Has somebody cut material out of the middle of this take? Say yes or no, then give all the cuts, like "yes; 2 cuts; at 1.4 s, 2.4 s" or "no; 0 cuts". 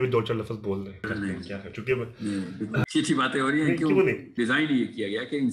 yes; 3 cuts; at 1.1 s, 2.9 s, 4.3 s